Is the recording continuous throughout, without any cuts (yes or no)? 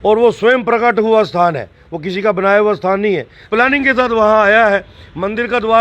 no